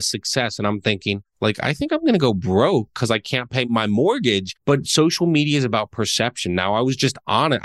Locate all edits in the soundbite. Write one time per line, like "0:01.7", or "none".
0:01.3
0:03.7
0:04.5